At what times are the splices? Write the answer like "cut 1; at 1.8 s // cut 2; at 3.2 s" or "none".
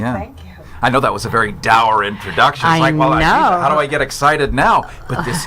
cut 1; at 1.6 s